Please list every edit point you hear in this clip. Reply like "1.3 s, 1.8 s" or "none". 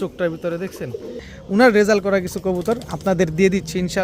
1.3 s